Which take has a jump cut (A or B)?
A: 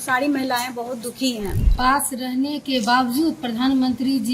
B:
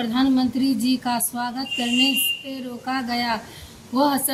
A